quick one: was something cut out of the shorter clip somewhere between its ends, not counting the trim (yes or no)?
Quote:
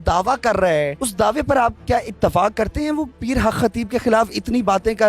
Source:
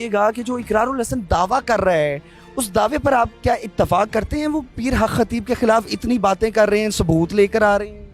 yes